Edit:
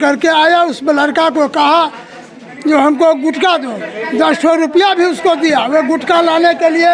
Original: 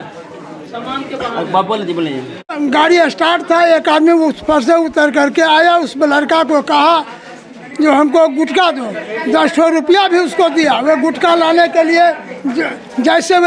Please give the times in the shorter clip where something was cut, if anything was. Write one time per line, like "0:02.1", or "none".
none